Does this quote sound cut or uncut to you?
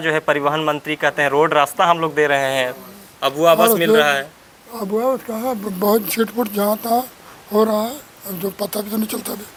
uncut